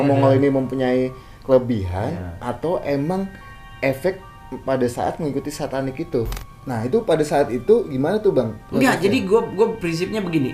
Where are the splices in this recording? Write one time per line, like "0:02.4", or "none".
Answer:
0:06.4